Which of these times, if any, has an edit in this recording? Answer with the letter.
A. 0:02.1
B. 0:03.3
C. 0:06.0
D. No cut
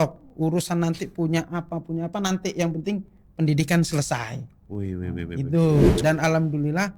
C